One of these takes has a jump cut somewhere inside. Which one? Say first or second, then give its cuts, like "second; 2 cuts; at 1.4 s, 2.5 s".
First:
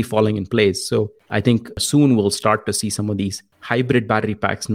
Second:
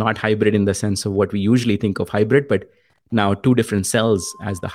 first; 2 cuts; at 1.7 s, 3.5 s